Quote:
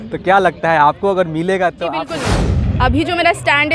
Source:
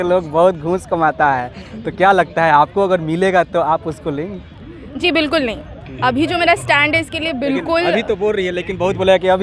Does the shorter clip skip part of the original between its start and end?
yes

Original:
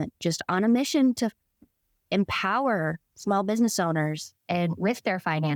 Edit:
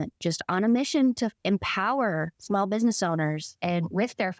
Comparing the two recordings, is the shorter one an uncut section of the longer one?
no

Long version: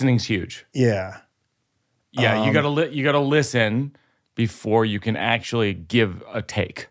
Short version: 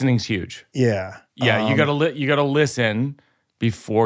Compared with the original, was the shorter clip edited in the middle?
yes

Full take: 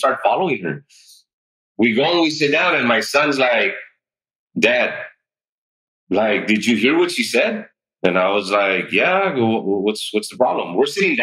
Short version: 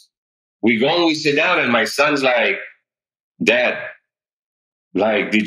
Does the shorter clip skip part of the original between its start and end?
no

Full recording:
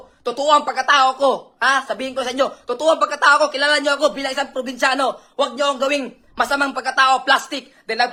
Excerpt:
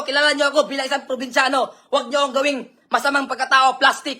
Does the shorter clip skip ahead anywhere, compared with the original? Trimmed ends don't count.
no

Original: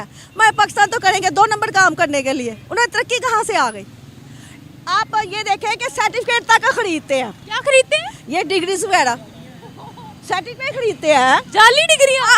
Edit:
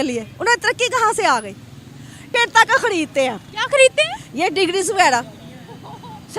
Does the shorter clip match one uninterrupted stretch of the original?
no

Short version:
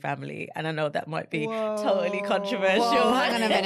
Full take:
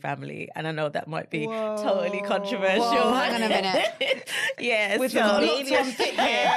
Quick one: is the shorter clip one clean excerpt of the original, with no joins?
yes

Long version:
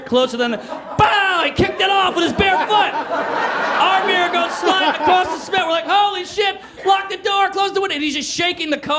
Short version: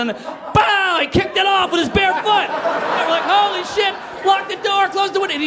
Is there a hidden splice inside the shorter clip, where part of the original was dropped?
yes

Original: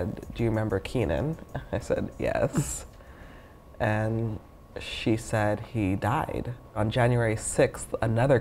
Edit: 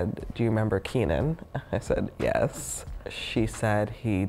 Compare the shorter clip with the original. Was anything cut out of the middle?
yes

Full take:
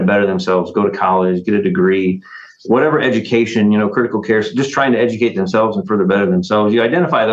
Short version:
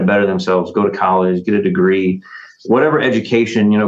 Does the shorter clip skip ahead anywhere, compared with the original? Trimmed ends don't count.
no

